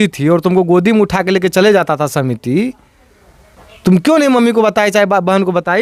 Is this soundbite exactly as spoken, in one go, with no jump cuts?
yes; 0 cuts

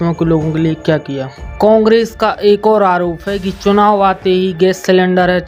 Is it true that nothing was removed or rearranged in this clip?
no; 1 cut; at 1.5 s

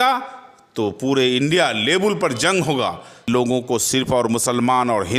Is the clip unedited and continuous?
no; 1 cut; at 3.3 s

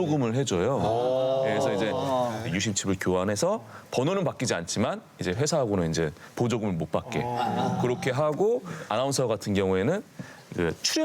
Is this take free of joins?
no; 1 cut; at 8.8 s

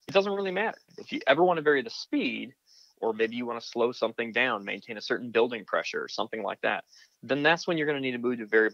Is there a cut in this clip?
yes; 1 cut; at 0.9 s

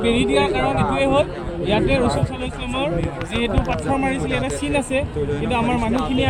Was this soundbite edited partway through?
no; 0 cuts

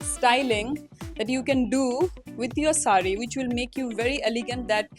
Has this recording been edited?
no; 0 cuts

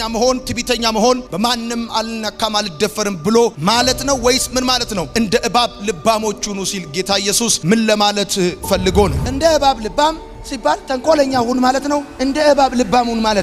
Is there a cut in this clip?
yes; 1 cut; at 9.2 s

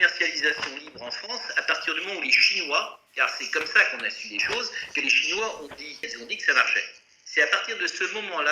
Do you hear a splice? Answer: yes; 1 cut; at 6.1 s

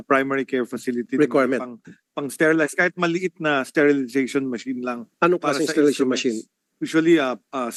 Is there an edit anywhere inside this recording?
no; 0 cuts

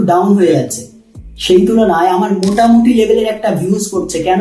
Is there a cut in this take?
no; 0 cuts

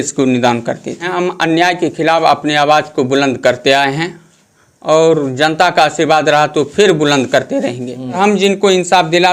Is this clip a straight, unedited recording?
no; 2 cuts; at 1.0 s, 8.2 s

